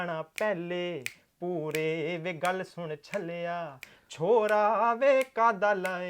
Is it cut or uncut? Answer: uncut